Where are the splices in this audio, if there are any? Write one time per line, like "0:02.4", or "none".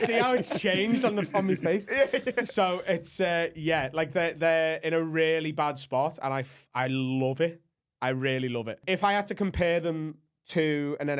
0:08.8

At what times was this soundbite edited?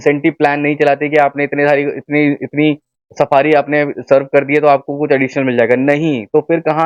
none

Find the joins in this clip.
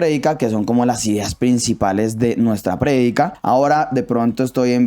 0:03.4

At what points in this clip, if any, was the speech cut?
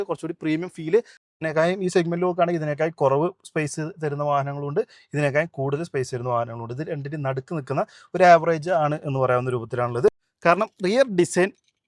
0:01.3
0:10.4

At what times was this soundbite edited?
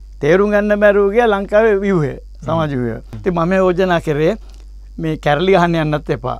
0:03.1

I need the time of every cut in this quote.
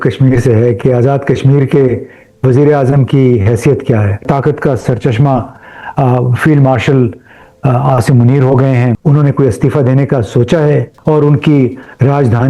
0:04.2
0:09.0
0:10.9

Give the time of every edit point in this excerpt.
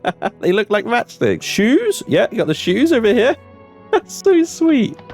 0:01.4

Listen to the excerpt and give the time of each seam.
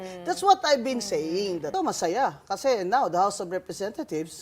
0:01.6

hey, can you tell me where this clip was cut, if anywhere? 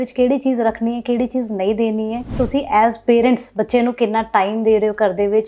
0:02.3

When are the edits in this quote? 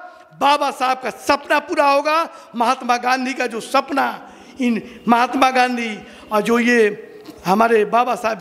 none

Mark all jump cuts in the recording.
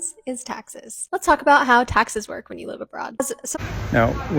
0:03.3

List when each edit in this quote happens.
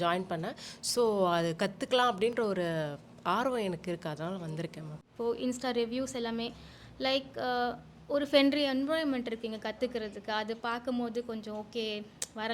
0:05.0

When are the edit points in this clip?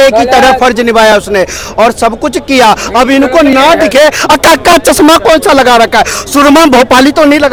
none

